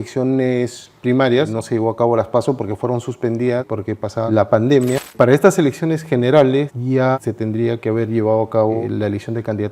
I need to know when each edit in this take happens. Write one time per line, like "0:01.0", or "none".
0:01.6
0:03.8
0:05.1
0:07.0
0:08.8